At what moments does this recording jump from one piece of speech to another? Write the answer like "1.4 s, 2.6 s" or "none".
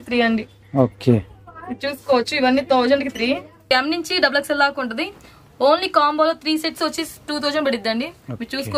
3.6 s

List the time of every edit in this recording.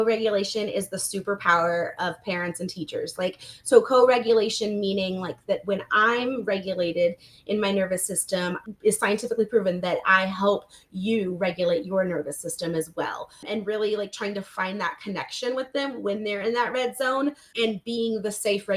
8.7 s, 13.4 s

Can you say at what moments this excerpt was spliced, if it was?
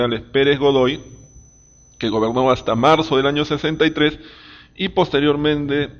1.5 s

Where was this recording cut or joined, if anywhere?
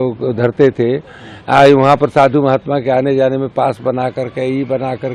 none

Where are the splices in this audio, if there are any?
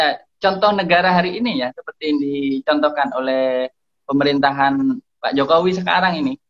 none

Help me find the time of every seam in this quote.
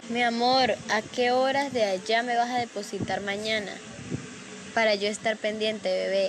none

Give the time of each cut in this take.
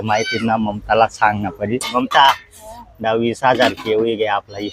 1.9 s

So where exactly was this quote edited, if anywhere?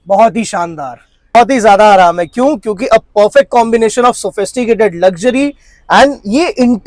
1.3 s

